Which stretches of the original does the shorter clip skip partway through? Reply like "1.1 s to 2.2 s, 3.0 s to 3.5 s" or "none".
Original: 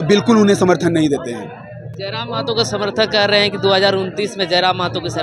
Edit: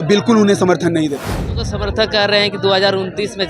1.7 s to 2.7 s